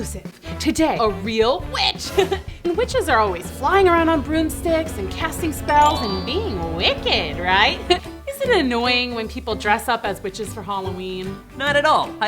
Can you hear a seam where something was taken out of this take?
yes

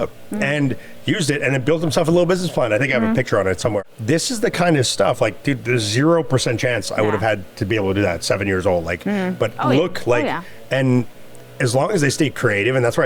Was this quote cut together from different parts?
yes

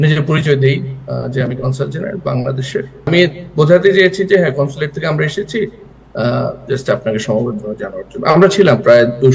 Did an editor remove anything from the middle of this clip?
yes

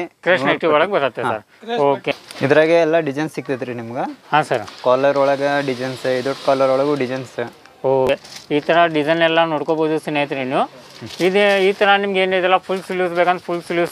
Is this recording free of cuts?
no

